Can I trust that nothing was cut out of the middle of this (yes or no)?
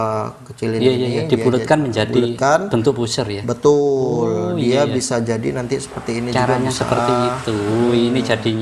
yes